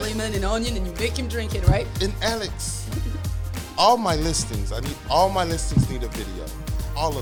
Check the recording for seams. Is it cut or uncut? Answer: uncut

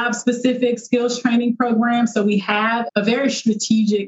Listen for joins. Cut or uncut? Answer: cut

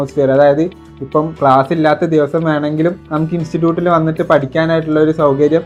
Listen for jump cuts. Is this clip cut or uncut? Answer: uncut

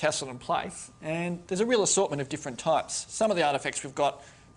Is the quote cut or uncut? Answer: cut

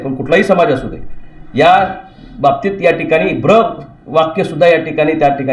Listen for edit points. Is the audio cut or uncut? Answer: uncut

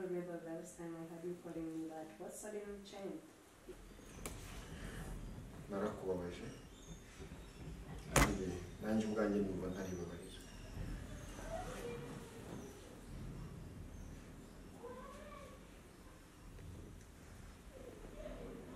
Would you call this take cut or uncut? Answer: cut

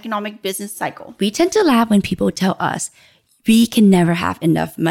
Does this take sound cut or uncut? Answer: cut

